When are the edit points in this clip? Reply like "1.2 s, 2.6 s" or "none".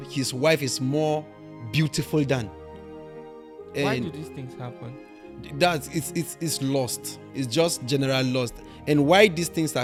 none

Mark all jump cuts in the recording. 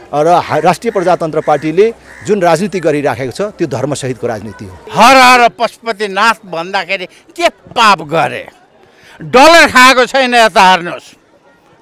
4.8 s

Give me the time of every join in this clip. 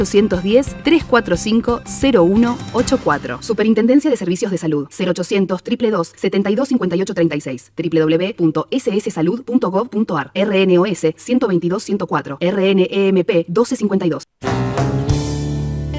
14.3 s

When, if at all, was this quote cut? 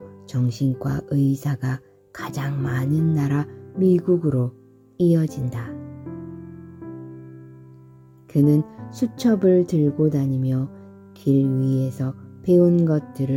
none

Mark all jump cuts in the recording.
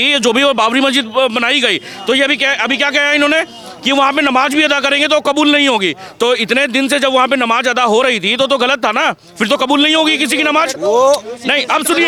none

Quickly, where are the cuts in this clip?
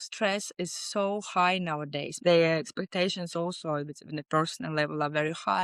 2.2 s

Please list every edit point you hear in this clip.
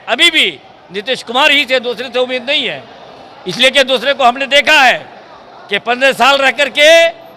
none

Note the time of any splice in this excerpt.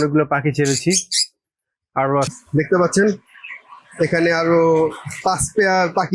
2.3 s

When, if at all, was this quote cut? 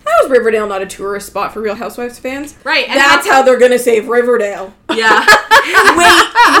1.8 s

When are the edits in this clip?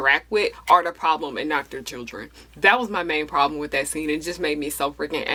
none

